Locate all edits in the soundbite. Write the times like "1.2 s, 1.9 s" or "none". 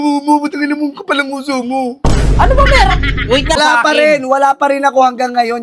3.6 s